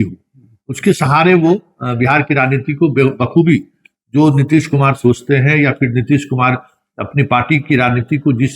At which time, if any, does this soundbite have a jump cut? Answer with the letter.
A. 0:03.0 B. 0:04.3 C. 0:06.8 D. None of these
D